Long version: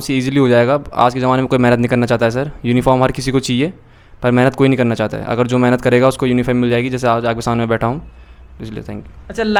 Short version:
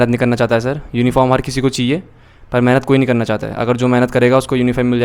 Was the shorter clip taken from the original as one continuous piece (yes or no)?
yes